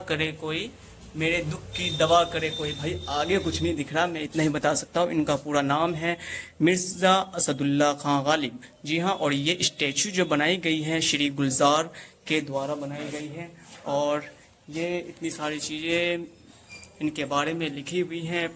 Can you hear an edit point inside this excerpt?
no; 0 cuts

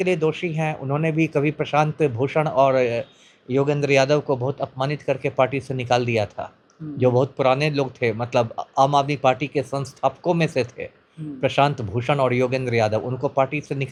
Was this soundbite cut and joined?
no; 0 cuts

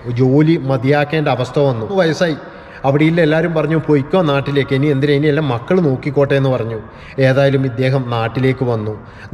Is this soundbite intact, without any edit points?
no; 1 cut; at 1.7 s

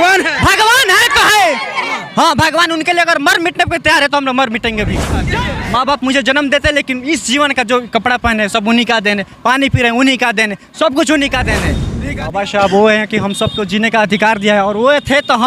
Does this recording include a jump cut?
yes; 2 cuts; at 5.3 s, 11.8 s

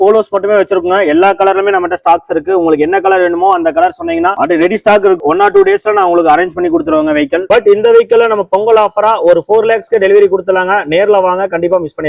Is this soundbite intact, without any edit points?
no; 1 cut; at 7.4 s

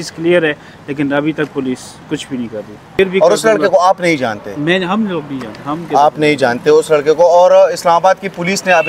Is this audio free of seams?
no; 1 cut; at 3.0 s

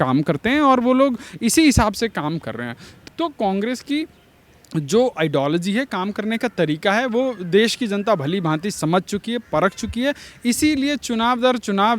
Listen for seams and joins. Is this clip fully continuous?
no; 1 cut; at 2.9 s

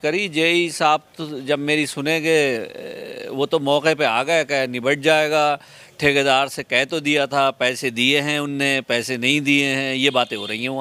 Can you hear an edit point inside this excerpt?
no; 0 cuts

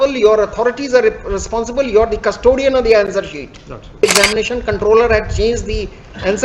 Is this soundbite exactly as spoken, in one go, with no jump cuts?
no; 1 cut; at 4.0 s

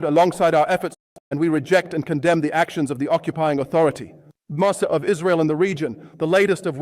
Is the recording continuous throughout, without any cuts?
no; 1 cut; at 1.1 s

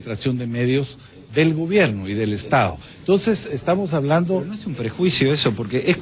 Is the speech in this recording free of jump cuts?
no; 1 cut; at 0.9 s

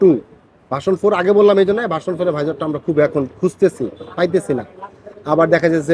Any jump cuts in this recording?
no; 0 cuts

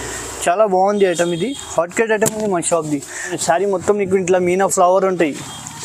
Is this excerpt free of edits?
no; 1 cut; at 3.4 s

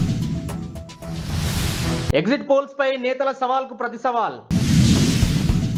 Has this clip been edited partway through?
no; 0 cuts

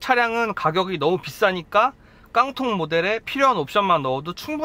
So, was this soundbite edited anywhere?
no; 0 cuts

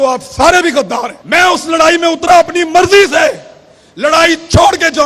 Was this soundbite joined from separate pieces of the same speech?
yes; 1 cut; at 1.2 s

